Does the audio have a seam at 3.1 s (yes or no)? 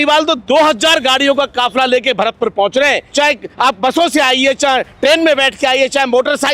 yes